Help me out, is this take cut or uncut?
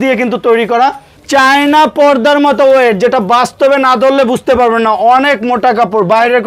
cut